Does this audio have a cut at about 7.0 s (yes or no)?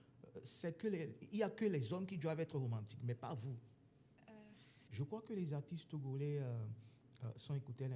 no